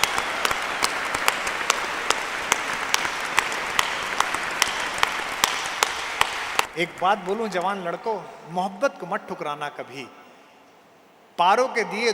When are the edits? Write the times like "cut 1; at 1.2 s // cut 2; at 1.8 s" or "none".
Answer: cut 1; at 6.7 s